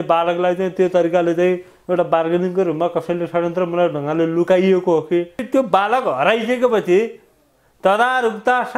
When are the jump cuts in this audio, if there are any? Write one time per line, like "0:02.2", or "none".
0:05.4